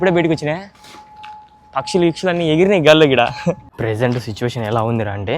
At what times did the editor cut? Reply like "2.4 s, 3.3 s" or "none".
3.7 s